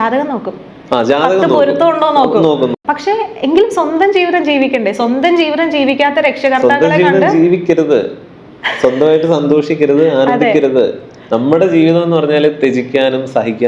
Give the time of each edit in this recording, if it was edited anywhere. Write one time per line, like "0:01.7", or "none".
0:02.7